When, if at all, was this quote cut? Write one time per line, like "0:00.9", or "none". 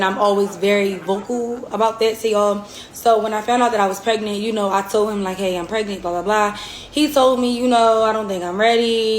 0:02.5
0:06.7